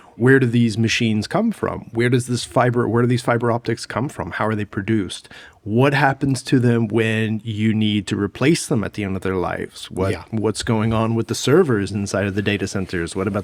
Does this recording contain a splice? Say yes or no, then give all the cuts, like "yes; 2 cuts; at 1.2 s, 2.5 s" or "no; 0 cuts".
no; 0 cuts